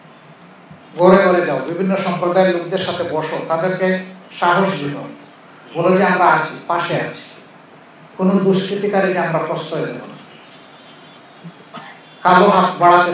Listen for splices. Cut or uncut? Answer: uncut